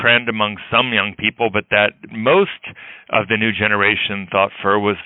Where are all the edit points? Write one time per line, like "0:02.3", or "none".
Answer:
0:02.1